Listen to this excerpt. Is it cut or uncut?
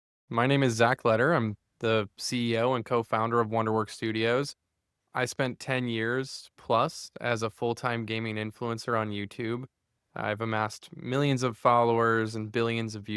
uncut